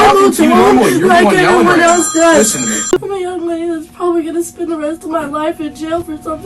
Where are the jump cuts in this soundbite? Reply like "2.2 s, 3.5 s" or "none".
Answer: 2.9 s